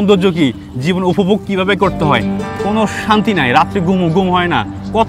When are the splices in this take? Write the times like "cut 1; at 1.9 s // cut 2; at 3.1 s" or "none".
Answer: cut 1; at 2.3 s